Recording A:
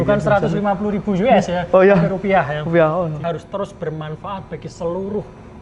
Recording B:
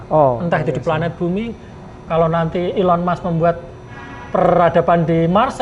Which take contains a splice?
A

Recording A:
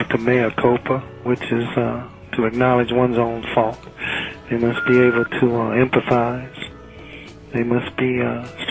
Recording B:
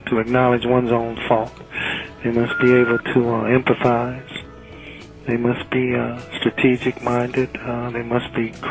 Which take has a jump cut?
A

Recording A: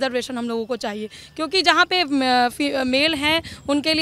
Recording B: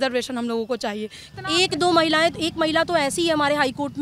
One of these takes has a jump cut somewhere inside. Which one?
B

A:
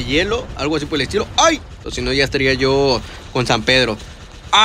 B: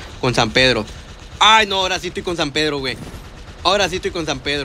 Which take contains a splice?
A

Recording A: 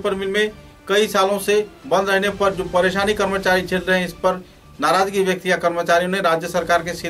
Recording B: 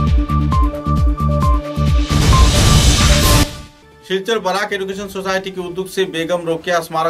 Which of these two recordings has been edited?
B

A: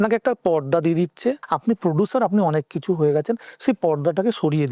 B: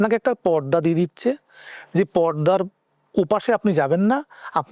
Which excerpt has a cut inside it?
A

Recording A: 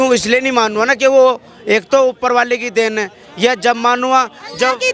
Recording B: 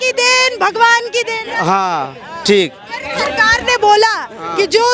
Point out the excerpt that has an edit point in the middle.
B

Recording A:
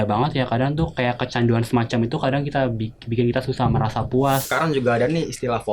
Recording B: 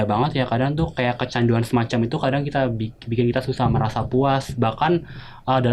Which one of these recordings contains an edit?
A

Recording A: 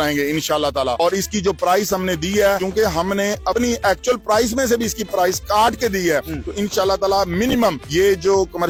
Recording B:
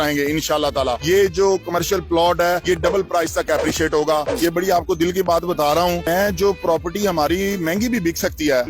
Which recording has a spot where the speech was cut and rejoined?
B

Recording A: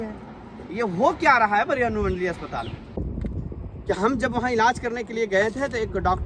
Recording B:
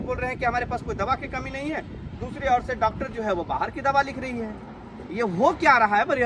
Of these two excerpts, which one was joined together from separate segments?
A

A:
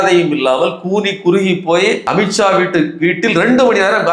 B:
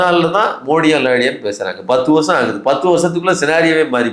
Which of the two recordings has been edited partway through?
A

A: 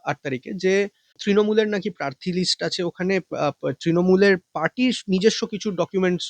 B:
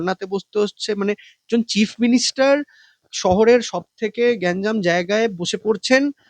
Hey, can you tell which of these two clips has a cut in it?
A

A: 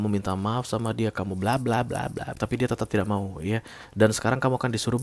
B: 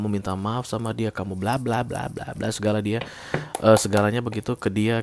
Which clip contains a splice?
A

